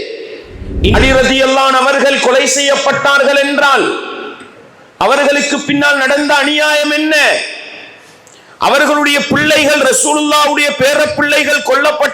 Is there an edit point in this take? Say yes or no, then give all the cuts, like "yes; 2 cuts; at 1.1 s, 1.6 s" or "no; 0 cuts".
yes; 1 cut; at 0.9 s